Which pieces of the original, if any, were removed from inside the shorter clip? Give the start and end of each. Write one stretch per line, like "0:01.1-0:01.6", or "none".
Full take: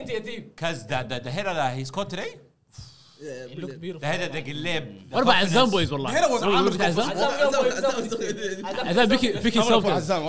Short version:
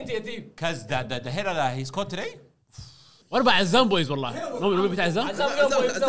0:03.2-0:05.0